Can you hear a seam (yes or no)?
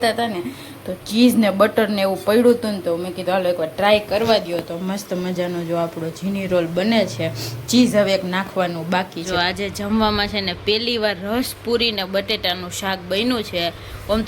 yes